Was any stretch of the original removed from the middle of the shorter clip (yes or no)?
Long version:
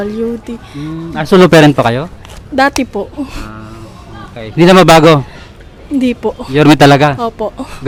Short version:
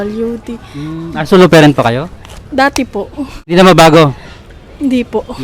yes